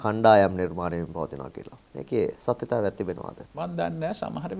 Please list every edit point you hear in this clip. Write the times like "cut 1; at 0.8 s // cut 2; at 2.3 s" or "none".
cut 1; at 3.4 s